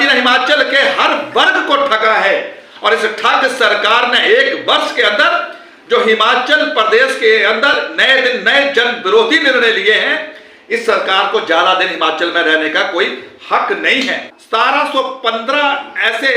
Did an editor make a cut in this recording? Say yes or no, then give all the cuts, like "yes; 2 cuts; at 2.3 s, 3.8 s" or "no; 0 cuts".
yes; 1 cut; at 14.3 s